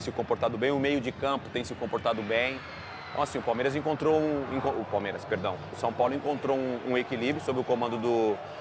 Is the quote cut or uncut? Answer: uncut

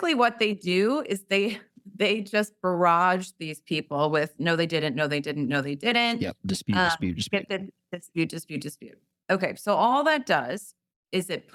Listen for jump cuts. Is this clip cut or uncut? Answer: uncut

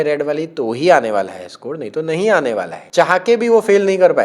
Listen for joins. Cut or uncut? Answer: cut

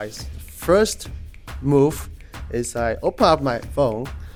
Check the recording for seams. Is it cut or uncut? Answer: uncut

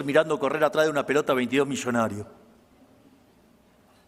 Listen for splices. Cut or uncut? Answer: uncut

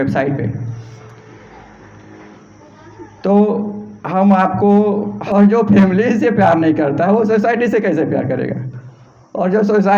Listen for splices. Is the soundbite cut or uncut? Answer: cut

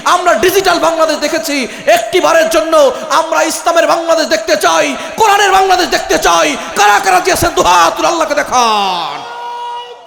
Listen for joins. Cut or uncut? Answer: uncut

